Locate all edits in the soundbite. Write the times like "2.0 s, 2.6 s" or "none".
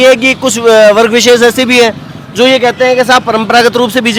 none

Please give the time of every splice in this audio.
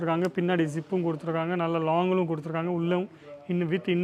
none

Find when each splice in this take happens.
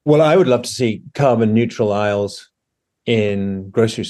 none

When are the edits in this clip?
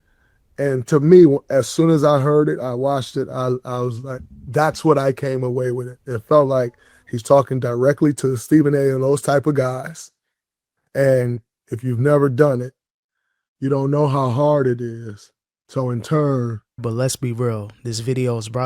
16.8 s

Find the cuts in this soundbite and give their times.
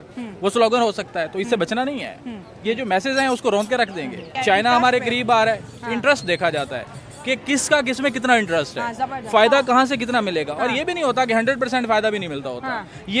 4.2 s

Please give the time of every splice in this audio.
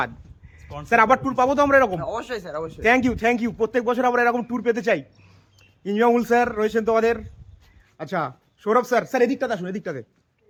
none

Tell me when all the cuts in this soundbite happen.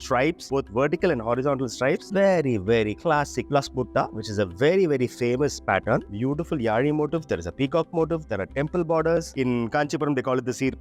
2.0 s, 6.1 s, 9.3 s

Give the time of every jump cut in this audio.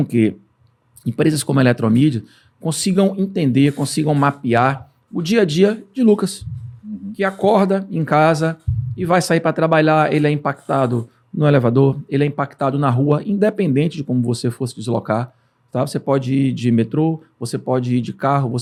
none

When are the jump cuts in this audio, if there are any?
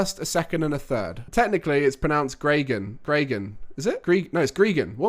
1.1 s

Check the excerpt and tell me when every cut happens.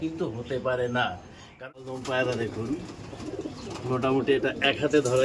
1.6 s

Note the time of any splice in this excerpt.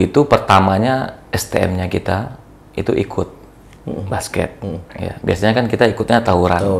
none

